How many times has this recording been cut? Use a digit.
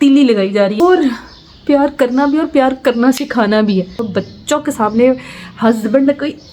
2